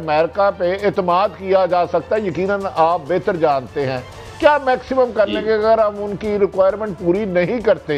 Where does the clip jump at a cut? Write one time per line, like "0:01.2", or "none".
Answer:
none